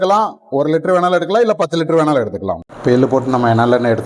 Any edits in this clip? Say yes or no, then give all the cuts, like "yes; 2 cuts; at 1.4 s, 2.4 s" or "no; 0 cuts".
yes; 1 cut; at 2.7 s